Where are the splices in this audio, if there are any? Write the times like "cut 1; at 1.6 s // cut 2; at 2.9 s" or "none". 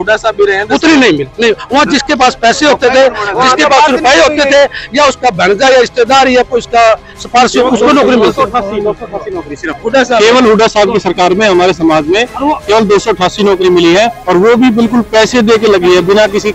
none